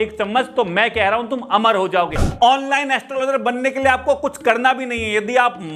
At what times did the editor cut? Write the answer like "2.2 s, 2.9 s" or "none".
2.3 s